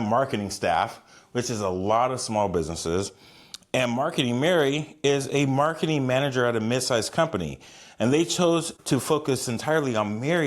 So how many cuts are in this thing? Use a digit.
1